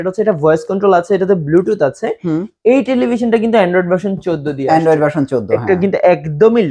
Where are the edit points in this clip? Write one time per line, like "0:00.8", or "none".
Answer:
none